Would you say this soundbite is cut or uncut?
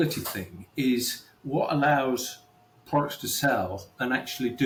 uncut